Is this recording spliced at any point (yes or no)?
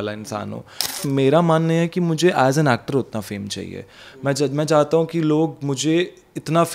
yes